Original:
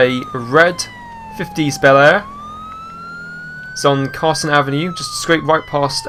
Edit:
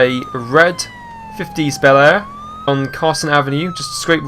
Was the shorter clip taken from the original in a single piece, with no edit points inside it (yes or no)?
no